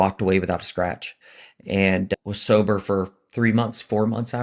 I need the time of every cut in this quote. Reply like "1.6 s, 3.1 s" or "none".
2.1 s